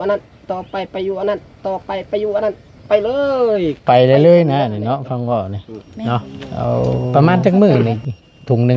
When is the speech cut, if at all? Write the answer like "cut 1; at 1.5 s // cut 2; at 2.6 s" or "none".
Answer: cut 1; at 7.1 s

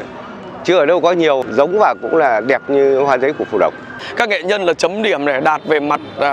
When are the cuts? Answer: cut 1; at 1.4 s // cut 2; at 4.0 s

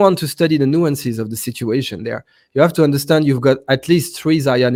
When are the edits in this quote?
none

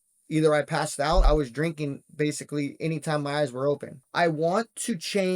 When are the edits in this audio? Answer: cut 1; at 1.3 s // cut 2; at 4.0 s

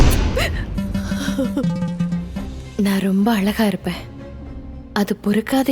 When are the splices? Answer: cut 1; at 2.4 s

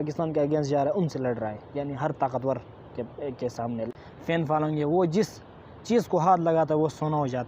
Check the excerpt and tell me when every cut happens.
cut 1; at 4.0 s

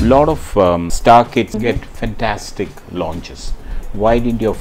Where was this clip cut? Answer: cut 1; at 0.9 s // cut 2; at 1.5 s

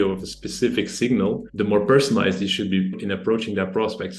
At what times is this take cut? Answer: cut 1; at 1.5 s // cut 2; at 3.0 s

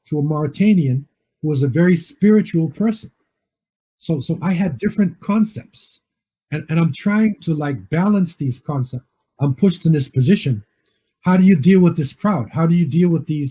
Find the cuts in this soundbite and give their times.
cut 1; at 9.2 s

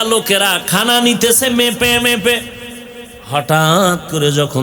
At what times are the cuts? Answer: none

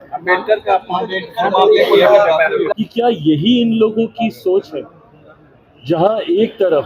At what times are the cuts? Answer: cut 1; at 2.7 s

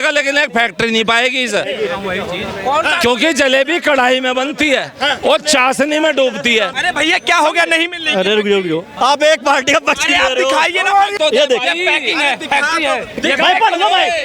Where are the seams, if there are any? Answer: cut 1; at 6.7 s // cut 2; at 8.9 s // cut 3; at 11.1 s

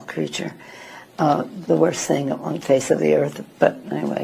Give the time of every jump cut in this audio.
none

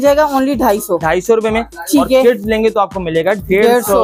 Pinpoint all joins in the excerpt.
none

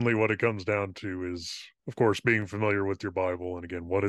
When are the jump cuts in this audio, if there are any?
cut 1; at 1.8 s

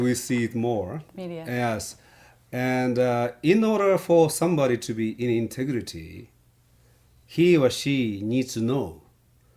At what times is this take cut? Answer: cut 1; at 2.5 s

